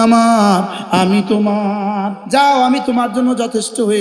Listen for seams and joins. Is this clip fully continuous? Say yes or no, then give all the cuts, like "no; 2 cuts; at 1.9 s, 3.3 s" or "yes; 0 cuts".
no; 1 cut; at 2.2 s